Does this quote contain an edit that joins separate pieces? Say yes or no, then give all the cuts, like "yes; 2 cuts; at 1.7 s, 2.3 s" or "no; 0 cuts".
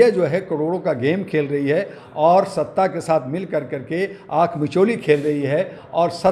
no; 0 cuts